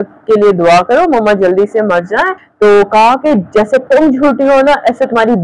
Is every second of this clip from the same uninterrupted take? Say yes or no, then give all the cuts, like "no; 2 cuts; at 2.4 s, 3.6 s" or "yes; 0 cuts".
no; 1 cut; at 2.4 s